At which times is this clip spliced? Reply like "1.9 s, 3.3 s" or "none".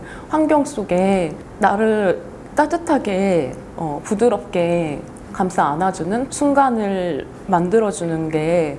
6.3 s